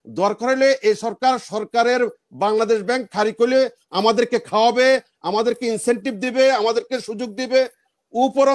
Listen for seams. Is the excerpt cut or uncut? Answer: uncut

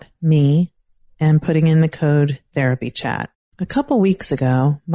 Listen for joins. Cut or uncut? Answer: cut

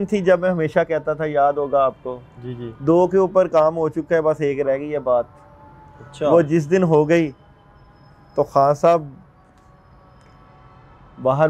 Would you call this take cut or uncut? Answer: uncut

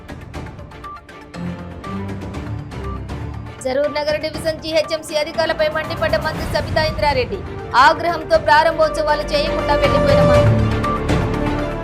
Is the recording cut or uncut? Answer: cut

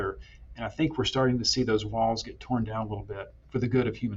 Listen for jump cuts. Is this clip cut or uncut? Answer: uncut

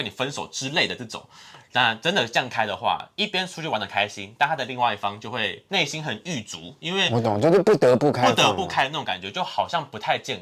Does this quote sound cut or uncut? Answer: uncut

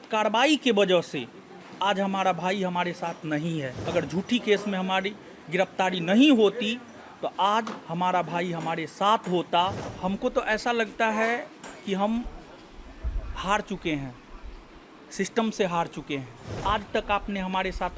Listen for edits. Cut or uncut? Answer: cut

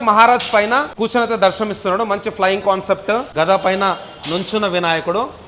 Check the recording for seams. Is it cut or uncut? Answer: cut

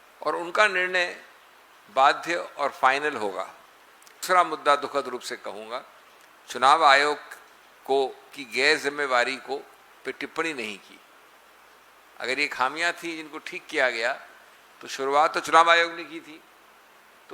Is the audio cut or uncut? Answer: cut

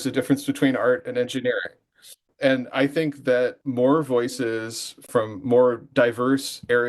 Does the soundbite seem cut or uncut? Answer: cut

